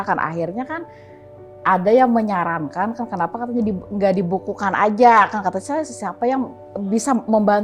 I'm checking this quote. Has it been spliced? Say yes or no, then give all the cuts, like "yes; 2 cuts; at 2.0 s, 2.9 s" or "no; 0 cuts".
no; 0 cuts